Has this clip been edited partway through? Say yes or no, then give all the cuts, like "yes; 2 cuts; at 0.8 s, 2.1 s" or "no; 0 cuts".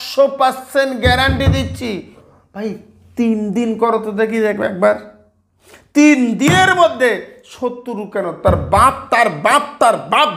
yes; 1 cut; at 2.3 s